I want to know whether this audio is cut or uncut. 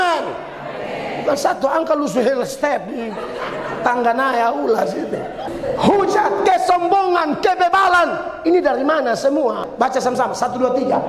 cut